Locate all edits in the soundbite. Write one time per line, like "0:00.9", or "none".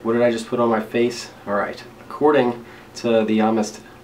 none

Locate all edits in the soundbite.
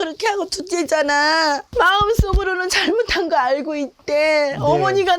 0:01.7

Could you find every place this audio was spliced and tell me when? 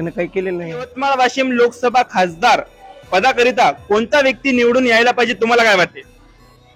0:01.0

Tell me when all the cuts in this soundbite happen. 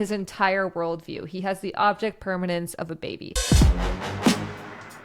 0:03.4

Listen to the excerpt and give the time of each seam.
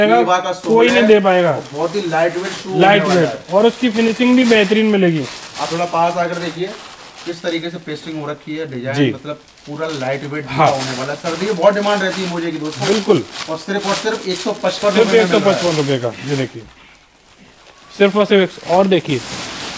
none

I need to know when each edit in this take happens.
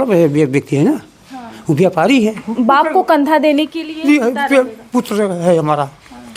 0:02.4

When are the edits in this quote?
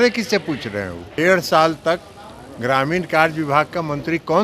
0:01.1

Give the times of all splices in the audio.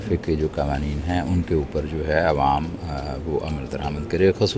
none

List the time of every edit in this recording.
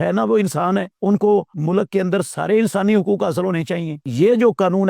0:00.9
0:01.5
0:04.1

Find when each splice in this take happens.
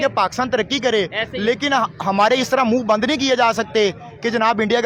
none

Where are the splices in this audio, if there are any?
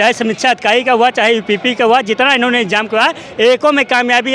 none

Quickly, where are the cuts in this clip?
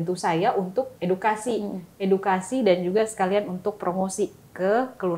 0:00.9

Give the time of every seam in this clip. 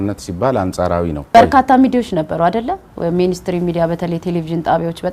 0:01.2

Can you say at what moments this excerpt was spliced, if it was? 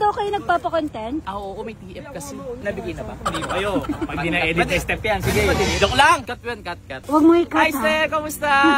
0:06.3

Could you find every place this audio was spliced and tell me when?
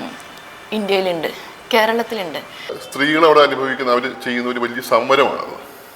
0:02.8

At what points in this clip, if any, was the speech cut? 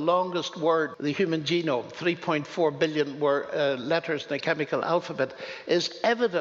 0:00.9

